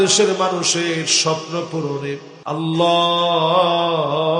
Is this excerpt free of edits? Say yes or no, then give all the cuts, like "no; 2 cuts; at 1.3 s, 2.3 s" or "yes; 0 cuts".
no; 1 cut; at 2.3 s